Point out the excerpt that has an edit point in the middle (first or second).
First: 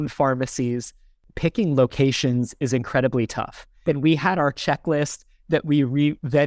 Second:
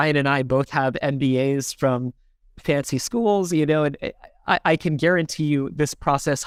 first